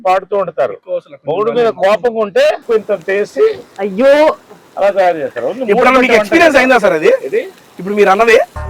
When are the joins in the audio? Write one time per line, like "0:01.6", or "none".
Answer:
0:02.6